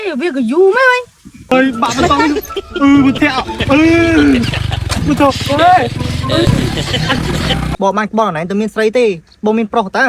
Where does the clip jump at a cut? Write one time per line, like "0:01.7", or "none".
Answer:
0:01.5
0:07.7